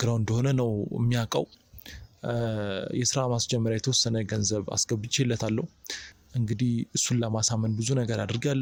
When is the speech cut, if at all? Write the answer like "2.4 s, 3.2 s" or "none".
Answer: none